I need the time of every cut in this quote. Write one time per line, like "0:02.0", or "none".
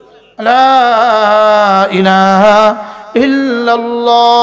none